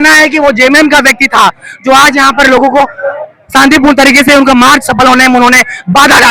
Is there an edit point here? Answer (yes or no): no